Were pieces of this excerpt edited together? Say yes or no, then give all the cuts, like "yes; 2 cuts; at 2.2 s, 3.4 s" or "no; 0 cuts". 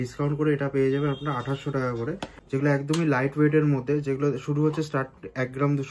yes; 1 cut; at 2.3 s